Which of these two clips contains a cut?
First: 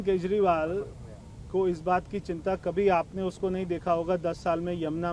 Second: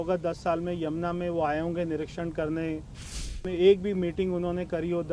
second; 1 cut; at 3.4 s

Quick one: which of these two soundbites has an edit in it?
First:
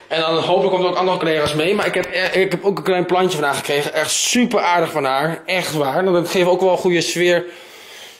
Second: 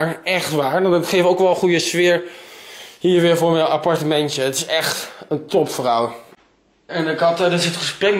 second; 1 cut; at 6.3 s

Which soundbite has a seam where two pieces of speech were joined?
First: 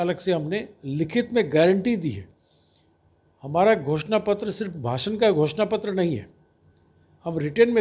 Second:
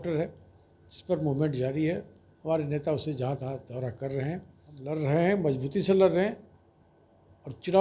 second; 1 cut; at 4.9 s

